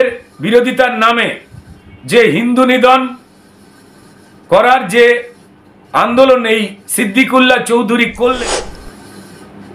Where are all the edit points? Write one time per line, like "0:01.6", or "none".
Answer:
0:08.4